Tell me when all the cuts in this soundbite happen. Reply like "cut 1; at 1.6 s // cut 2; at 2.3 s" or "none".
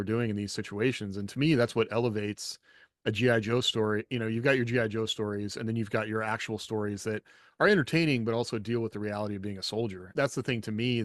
cut 1; at 10.1 s